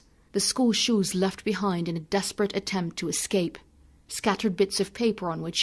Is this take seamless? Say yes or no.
yes